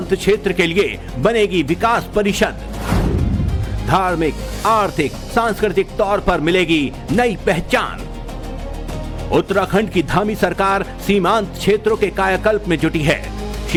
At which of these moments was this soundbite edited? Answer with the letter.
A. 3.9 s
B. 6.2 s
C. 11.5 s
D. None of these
D